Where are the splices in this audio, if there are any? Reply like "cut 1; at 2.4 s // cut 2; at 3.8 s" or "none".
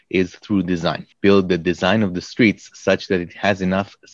cut 1; at 1.1 s